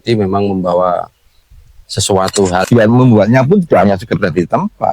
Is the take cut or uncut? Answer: cut